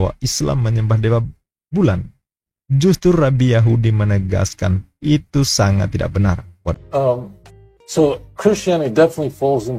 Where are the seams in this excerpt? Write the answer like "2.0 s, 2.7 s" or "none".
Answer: 6.8 s